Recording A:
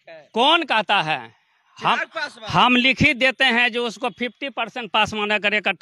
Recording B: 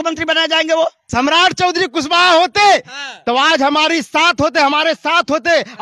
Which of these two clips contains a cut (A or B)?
B